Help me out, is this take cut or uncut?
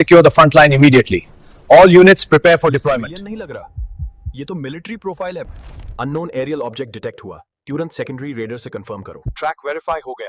cut